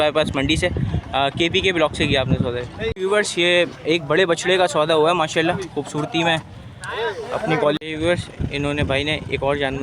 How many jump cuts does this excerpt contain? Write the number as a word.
two